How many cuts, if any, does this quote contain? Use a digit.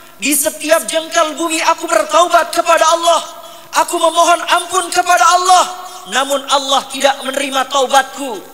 0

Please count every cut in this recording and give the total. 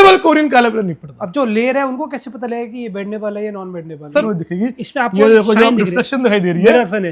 1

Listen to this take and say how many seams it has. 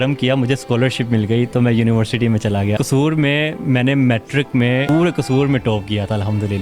2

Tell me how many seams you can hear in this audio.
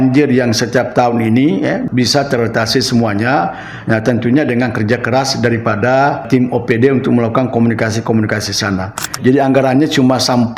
3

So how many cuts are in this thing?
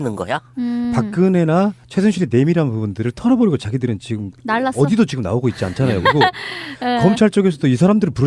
1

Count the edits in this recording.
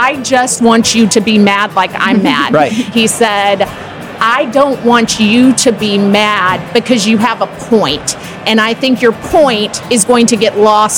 1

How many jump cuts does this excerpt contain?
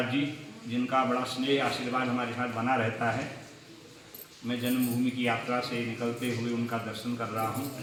0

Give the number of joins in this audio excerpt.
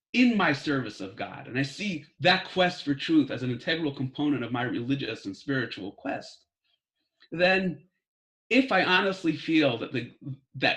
1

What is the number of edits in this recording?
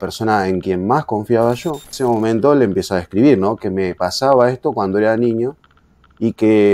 1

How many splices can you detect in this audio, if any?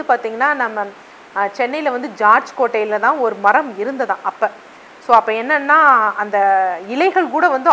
0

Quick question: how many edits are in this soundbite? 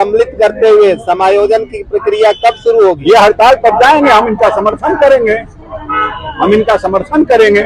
1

